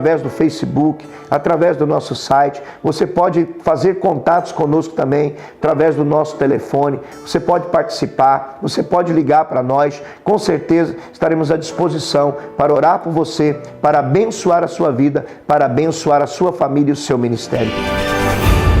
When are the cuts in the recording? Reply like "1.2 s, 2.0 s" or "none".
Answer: 17.7 s